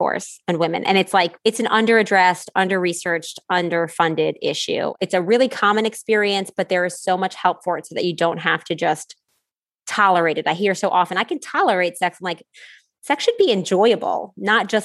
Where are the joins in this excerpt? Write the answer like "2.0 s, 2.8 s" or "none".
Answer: 1.3 s, 4.9 s